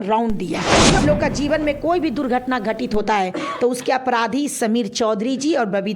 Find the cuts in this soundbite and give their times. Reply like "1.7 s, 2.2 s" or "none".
1.0 s